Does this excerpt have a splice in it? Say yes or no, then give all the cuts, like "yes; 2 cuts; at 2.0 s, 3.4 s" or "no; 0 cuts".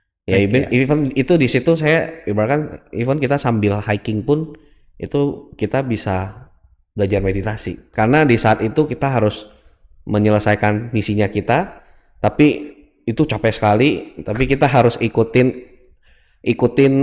yes; 1 cut; at 7.8 s